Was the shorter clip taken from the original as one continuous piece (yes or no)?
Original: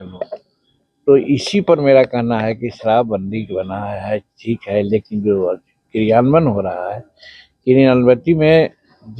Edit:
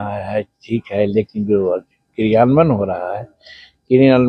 yes